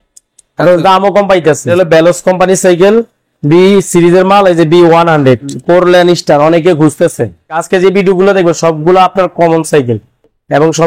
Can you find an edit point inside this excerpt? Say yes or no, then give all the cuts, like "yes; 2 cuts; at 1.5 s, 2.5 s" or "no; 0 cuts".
yes; 3 cuts; at 1.7 s, 5.5 s, 7.6 s